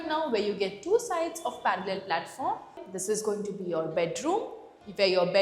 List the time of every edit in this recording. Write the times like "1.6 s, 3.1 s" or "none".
2.8 s